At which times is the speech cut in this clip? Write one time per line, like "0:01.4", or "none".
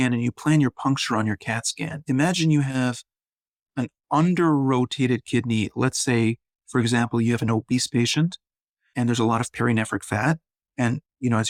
none